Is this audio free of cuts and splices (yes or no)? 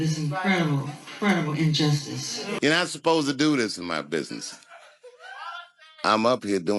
no